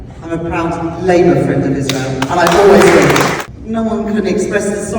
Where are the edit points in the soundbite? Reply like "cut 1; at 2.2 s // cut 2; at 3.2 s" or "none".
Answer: cut 1; at 3.4 s